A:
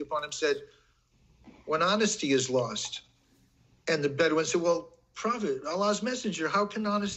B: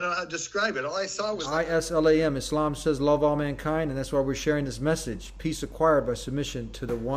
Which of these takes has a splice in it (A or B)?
B